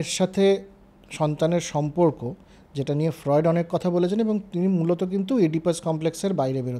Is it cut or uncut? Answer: uncut